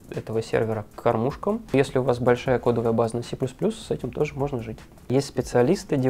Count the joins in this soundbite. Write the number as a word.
two